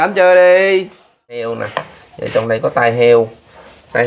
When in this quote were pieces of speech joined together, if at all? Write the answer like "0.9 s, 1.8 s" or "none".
1.4 s